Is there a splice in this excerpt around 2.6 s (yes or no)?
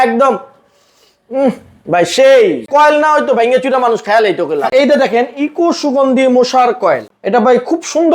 yes